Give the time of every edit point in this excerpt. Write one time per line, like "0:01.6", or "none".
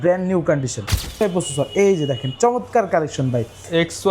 0:01.2